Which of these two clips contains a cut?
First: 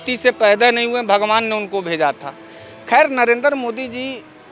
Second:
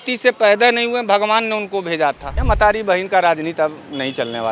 second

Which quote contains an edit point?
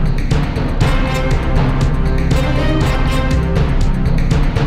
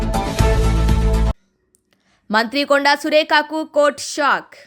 second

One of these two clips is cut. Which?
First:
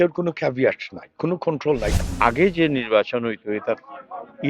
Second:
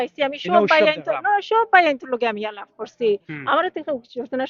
first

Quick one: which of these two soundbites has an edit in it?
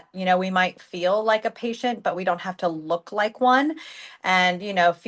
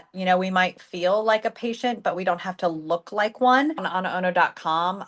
second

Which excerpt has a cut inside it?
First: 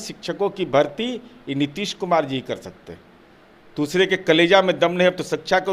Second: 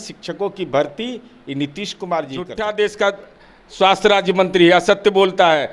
second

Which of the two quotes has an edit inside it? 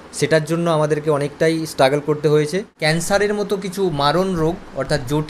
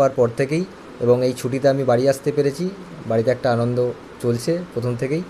first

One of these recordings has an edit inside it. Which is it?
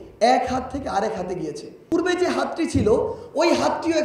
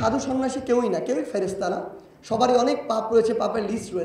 first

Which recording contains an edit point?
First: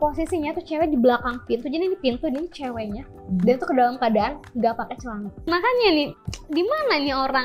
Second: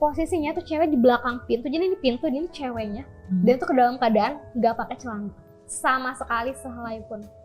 first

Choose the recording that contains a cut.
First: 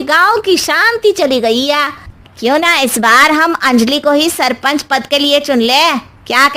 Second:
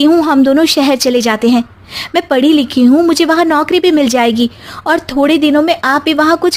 first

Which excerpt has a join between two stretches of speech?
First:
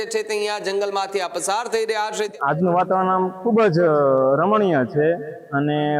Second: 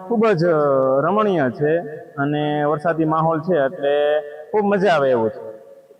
first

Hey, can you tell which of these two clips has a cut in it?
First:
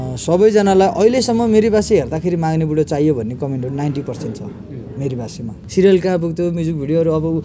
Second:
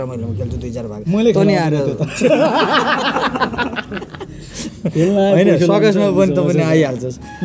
first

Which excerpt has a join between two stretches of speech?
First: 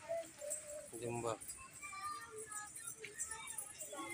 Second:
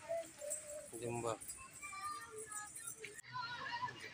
second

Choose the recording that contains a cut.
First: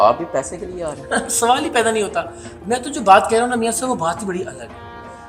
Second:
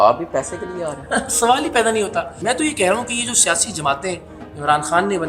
second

